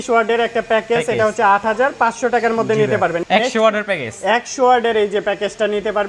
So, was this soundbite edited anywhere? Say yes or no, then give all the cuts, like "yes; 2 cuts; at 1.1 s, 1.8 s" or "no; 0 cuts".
yes; 1 cut; at 3.2 s